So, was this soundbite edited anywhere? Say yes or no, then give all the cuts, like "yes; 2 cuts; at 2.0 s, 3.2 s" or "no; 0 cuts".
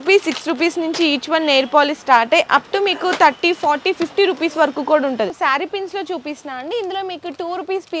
yes; 1 cut; at 5.3 s